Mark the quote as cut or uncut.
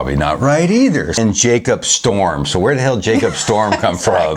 cut